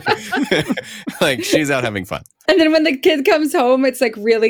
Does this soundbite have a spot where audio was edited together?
yes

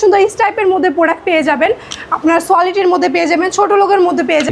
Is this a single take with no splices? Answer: yes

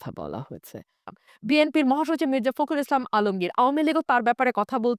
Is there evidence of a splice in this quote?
yes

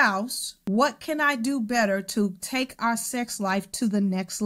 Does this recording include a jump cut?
no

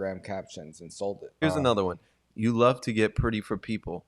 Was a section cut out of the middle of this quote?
yes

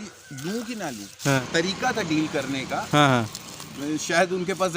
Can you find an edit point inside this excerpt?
yes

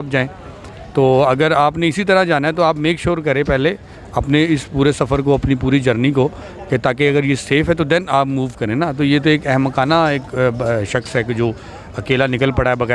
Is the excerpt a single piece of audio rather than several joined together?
yes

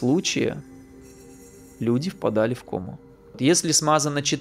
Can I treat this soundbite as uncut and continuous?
no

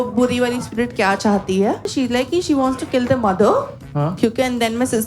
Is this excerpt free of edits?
no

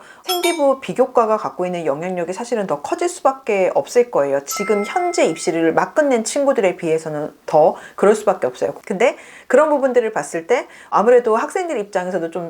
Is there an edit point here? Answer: yes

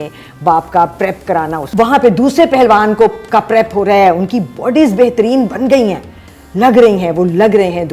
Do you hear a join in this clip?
yes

